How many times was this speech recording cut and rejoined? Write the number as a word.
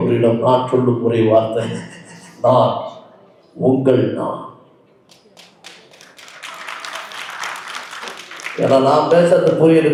zero